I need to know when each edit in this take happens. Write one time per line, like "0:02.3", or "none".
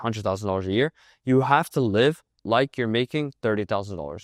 none